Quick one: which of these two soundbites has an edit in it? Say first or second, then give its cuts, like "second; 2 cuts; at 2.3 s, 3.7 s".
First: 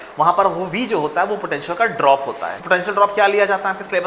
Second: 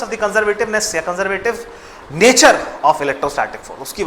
first; 1 cut; at 2.6 s